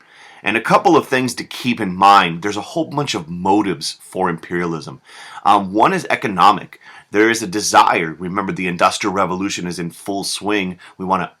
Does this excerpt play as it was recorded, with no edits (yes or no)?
no